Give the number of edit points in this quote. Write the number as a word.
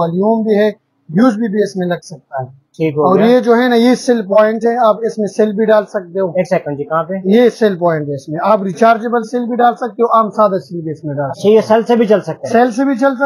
zero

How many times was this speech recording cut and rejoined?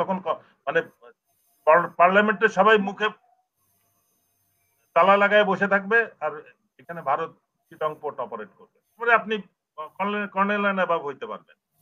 one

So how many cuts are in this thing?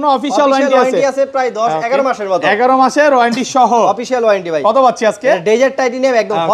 zero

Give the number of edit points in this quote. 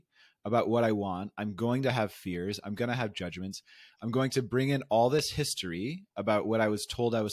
zero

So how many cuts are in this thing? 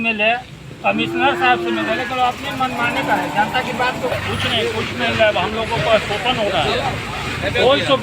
one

